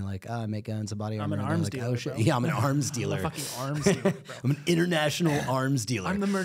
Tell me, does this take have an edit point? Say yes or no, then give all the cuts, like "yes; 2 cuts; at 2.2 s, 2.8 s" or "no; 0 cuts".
no; 0 cuts